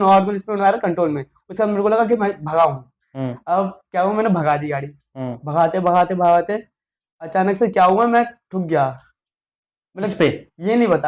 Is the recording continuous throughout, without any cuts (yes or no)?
yes